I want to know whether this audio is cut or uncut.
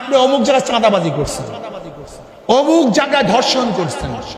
uncut